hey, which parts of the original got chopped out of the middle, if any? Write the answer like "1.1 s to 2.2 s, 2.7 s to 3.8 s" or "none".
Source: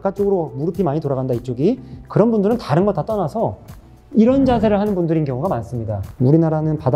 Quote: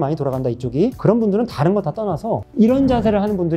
1.8 s to 2.1 s, 3.6 s to 4.0 s